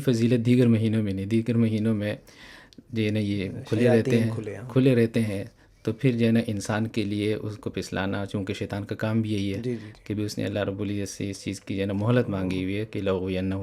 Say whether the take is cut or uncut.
uncut